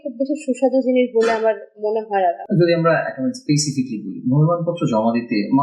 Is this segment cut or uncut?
cut